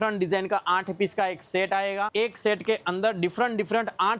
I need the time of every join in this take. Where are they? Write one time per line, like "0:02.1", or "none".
0:02.1